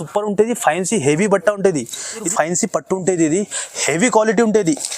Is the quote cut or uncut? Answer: cut